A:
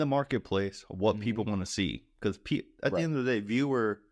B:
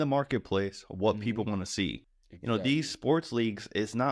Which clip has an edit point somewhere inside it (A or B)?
B